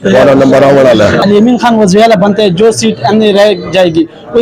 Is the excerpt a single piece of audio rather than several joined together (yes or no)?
no